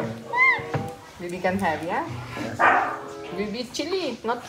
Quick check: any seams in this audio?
yes; 1 cut; at 3.1 s

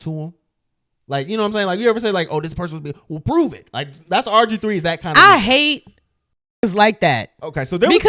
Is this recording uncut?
yes; 0 cuts

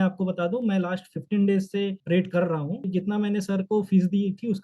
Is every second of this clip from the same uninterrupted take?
yes; 0 cuts

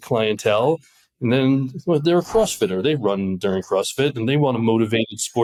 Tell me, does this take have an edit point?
no; 0 cuts

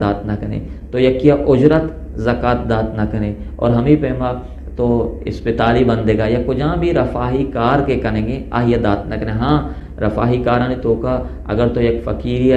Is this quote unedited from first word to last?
yes; 0 cuts

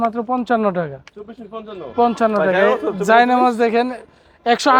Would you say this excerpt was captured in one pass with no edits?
yes; 0 cuts

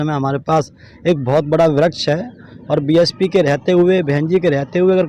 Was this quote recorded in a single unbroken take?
yes; 0 cuts

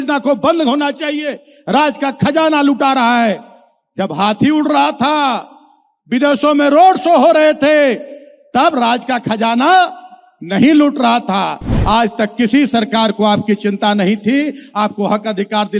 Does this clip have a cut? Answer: yes; 1 cut; at 11.7 s

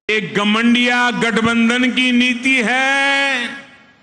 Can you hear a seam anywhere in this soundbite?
no; 0 cuts

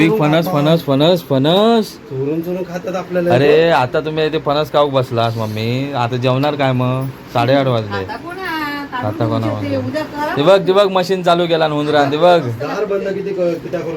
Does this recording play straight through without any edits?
yes; 0 cuts

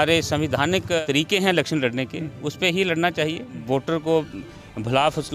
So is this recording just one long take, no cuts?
no; 2 cuts; at 1.0 s, 3.6 s

